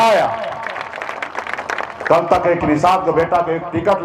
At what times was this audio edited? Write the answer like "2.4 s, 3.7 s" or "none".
none